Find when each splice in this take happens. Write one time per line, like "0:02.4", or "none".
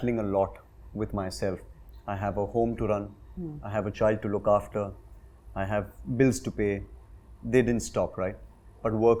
none